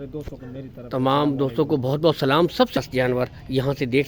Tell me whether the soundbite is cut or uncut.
cut